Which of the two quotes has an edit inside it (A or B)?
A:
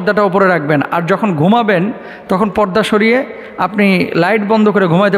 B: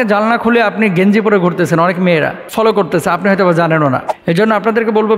B